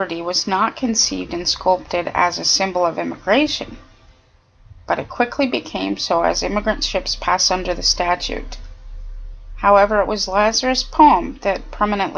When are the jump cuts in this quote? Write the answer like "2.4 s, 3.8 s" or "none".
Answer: 10.9 s